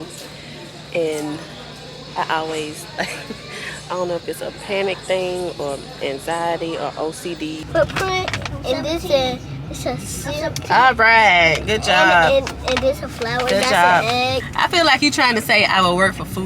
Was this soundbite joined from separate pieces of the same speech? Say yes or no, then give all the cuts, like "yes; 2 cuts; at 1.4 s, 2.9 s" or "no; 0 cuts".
yes; 2 cuts; at 7.6 s, 14.5 s